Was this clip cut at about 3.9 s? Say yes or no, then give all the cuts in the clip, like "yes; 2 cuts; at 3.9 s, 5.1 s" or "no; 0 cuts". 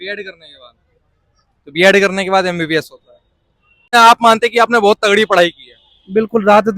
yes; 1 cut; at 3.9 s